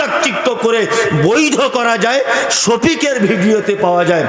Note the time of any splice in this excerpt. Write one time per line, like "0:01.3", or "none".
none